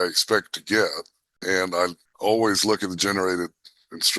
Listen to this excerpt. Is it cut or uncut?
cut